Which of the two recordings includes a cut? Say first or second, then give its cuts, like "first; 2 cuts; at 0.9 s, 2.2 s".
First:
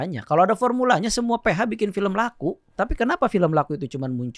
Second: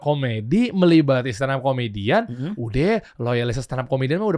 first; 1 cut; at 2.7 s